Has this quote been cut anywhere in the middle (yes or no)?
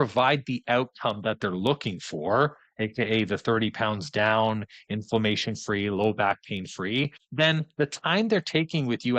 no